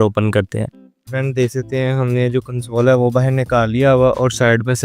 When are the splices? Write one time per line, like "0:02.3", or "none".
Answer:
0:01.1